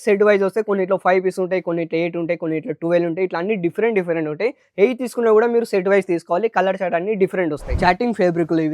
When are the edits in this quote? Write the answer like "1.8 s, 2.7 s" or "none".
7.6 s